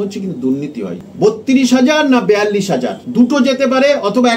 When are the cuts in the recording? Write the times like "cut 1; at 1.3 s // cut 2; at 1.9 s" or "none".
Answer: cut 1; at 1.0 s // cut 2; at 3.0 s

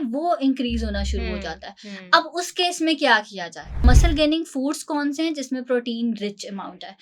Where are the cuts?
cut 1; at 3.8 s

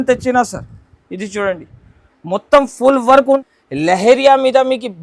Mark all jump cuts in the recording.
cut 1; at 3.4 s

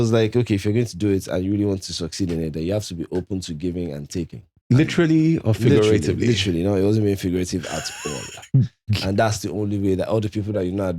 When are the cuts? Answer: cut 1; at 4.5 s

